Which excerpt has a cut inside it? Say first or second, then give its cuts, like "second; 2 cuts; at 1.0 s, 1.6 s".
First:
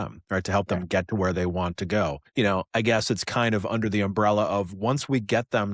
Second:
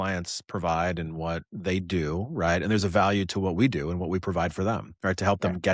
first; 1 cut; at 2.2 s